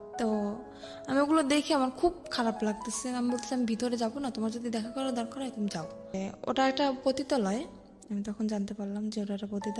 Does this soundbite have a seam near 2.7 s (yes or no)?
no